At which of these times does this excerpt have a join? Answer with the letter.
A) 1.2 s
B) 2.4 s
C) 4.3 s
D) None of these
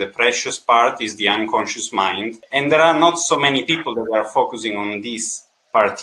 B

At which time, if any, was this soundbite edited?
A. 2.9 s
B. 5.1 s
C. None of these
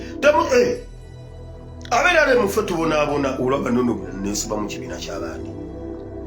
B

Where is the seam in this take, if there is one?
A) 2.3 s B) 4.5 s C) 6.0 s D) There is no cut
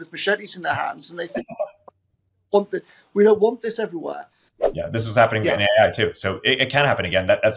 B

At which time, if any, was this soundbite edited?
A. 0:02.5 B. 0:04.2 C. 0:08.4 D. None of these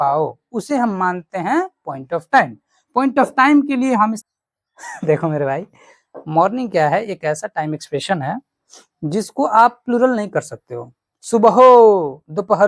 B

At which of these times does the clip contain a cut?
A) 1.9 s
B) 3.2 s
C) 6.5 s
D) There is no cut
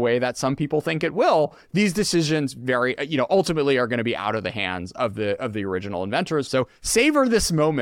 C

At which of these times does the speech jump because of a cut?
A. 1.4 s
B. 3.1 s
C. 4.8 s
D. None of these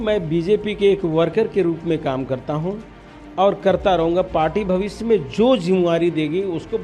D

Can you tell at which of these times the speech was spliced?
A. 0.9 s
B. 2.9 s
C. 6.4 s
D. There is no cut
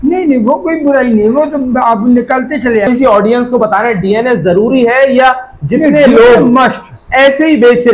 B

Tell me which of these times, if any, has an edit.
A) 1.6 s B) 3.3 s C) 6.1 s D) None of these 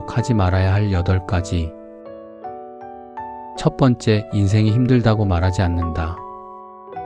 C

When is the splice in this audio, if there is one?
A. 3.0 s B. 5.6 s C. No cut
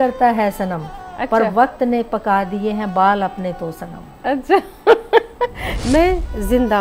B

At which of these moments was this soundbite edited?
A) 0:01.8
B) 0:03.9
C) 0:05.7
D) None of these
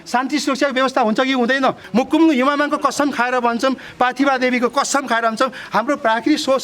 A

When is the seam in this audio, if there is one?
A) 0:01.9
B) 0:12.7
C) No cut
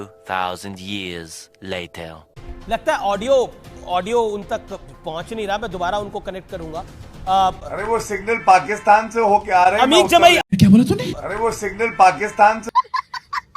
B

